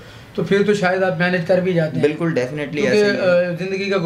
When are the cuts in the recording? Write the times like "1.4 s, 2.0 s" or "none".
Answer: none